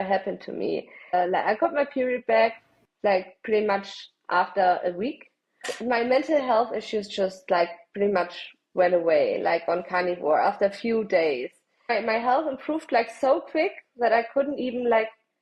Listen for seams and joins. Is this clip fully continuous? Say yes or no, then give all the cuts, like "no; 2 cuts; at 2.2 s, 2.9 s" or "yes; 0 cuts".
no; 3 cuts; at 1.1 s, 5.7 s, 11.8 s